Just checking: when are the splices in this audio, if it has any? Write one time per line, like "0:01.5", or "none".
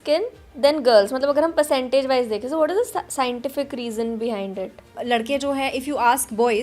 0:04.9